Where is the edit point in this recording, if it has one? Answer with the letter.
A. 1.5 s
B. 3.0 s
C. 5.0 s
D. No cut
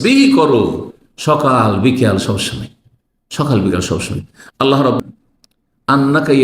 C